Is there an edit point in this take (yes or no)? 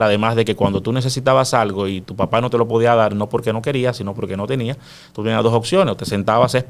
no